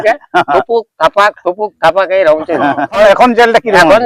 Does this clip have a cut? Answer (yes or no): yes